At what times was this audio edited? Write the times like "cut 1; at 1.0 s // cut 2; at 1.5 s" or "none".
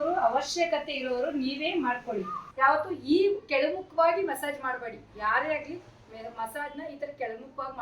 cut 1; at 2.4 s